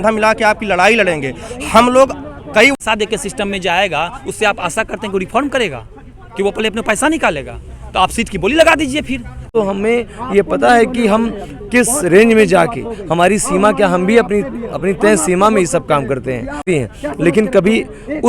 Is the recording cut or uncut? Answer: cut